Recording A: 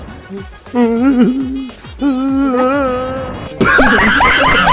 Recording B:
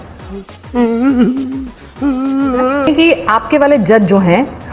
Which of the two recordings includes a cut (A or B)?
B